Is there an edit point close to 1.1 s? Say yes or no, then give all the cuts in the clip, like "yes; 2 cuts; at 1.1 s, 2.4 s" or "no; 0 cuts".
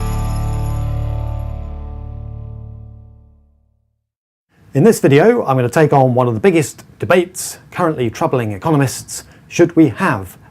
yes; 1 cut; at 1.1 s